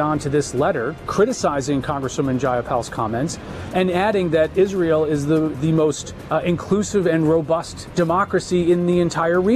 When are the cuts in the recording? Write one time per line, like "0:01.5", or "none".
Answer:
0:01.1
0:05.8
0:07.8